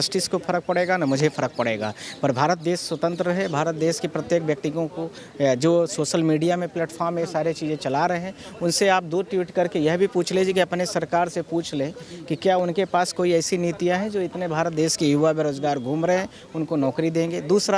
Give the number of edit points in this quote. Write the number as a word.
zero